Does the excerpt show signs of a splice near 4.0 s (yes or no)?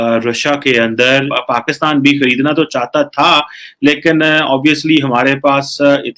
no